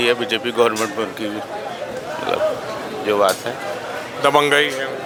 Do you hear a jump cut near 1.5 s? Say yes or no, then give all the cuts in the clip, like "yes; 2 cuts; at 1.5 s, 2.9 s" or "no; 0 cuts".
no; 0 cuts